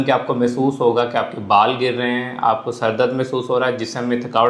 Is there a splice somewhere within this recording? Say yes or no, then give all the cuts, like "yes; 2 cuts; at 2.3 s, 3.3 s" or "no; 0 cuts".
no; 0 cuts